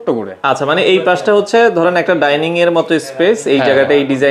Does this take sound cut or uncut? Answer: uncut